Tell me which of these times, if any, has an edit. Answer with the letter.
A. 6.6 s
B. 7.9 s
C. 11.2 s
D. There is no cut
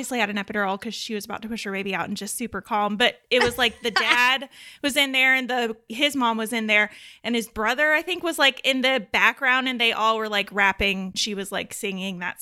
C